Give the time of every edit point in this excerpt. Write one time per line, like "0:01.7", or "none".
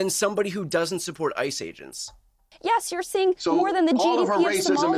0:02.5